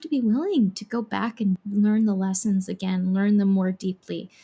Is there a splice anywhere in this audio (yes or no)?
yes